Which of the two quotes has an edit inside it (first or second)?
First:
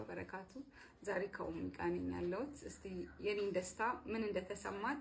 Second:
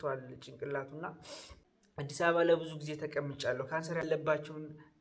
second